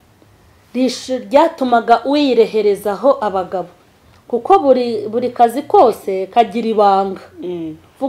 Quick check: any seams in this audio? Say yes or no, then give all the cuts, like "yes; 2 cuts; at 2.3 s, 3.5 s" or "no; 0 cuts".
no; 0 cuts